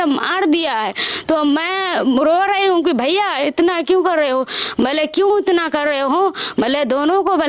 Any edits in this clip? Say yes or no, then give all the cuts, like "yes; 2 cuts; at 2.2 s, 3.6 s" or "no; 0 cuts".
no; 0 cuts